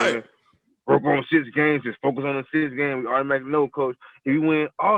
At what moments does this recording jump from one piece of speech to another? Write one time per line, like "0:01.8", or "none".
none